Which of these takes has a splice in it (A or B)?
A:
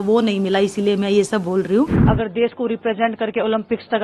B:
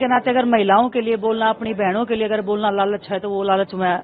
A